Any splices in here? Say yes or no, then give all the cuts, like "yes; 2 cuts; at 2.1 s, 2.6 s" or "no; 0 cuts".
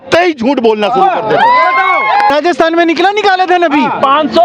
yes; 1 cut; at 2.3 s